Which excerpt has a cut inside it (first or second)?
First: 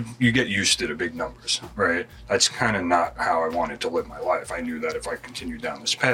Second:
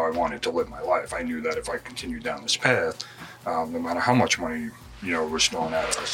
first